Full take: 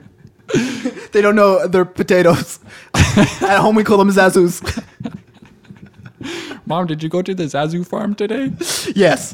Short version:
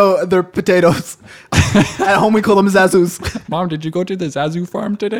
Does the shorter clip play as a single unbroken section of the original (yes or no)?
no